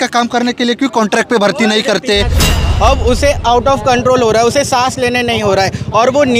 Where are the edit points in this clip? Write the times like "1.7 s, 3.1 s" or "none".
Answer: 2.5 s